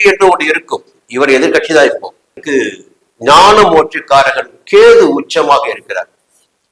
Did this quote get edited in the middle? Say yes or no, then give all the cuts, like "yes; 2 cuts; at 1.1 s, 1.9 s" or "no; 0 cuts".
yes; 1 cut; at 2.4 s